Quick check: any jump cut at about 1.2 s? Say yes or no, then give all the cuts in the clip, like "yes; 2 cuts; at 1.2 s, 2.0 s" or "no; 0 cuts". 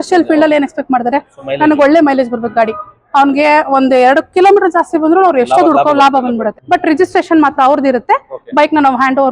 no; 1 cut; at 6.5 s